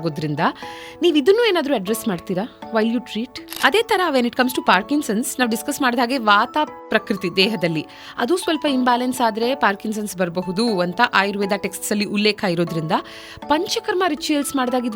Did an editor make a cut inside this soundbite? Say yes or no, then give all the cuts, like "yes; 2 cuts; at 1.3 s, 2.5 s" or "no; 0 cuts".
yes; 1 cut; at 3.6 s